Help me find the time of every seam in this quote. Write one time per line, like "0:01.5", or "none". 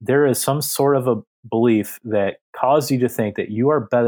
0:01.3

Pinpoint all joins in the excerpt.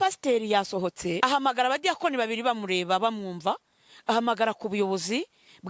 0:01.2

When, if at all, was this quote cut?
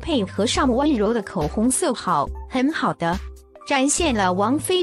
none

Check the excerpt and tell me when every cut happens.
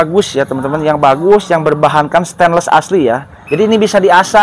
0:03.3

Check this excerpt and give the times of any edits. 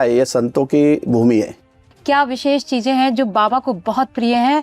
0:01.7

